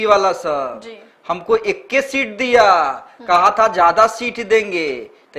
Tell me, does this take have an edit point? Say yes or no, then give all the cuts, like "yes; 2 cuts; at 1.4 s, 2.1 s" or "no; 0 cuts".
no; 0 cuts